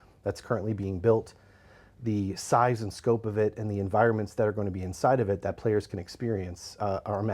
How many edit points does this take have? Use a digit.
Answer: 0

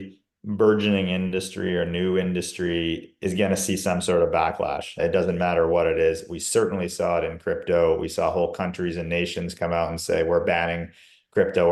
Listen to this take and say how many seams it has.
0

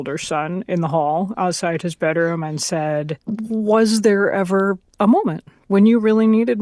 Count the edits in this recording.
1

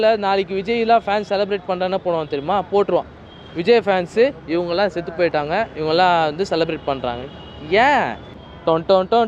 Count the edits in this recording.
1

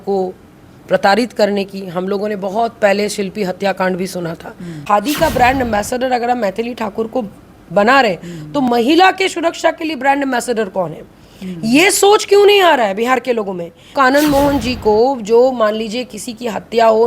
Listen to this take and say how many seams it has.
2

